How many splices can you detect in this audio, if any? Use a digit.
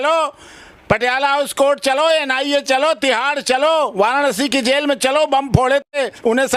0